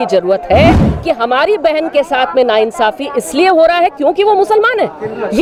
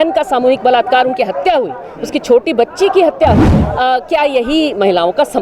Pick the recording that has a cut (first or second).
second